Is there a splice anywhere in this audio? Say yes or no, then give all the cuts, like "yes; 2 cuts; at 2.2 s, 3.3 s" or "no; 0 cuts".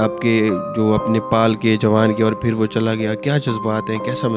no; 0 cuts